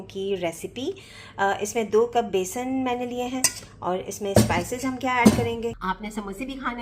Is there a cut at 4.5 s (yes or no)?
no